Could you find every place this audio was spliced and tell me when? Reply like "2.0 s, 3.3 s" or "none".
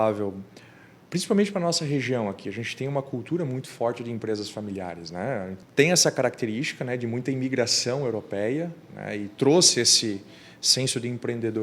5.5 s